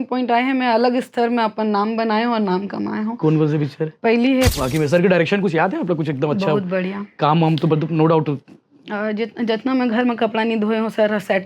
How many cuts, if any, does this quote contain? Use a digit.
1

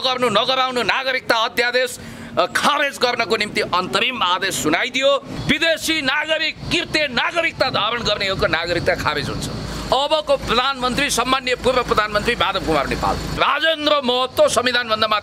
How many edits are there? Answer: 3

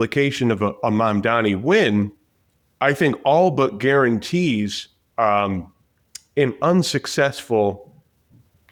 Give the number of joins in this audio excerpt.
0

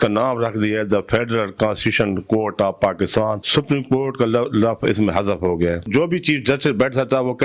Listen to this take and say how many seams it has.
2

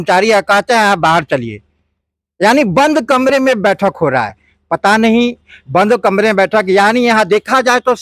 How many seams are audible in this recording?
0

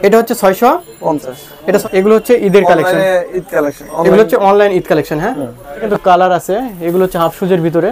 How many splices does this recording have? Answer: 2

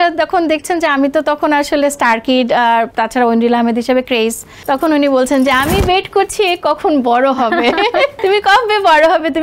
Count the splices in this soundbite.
3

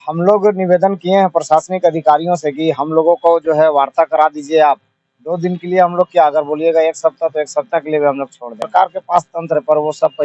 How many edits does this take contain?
1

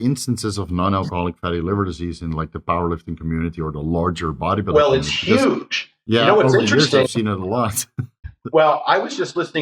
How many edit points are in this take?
0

